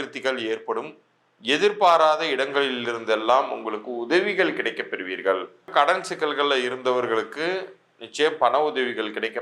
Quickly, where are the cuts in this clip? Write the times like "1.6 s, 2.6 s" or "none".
5.7 s

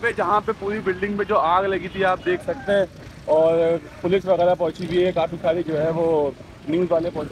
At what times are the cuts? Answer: none

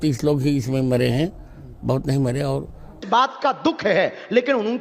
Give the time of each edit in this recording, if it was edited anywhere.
3.0 s

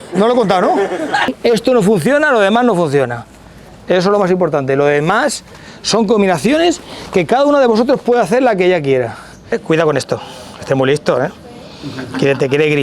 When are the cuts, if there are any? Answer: 1.3 s, 9.6 s

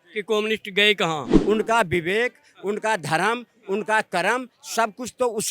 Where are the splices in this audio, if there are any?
1.3 s

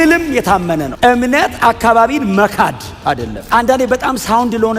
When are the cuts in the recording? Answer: 0.9 s, 3.4 s

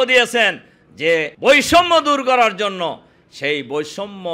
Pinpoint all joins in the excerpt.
1.3 s

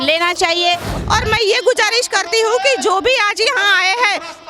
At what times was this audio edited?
0.9 s

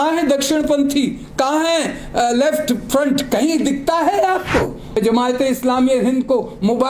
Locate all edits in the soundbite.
4.8 s

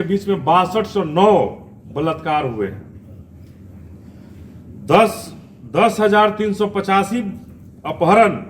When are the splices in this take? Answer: none

